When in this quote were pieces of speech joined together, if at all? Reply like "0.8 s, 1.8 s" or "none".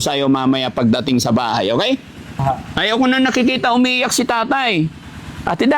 2.4 s